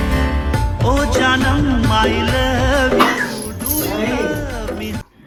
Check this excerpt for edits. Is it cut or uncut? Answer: uncut